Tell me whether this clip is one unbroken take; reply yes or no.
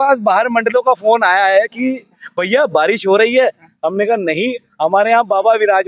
yes